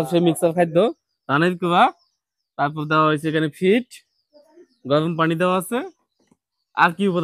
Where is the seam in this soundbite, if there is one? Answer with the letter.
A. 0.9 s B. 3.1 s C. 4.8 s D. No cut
D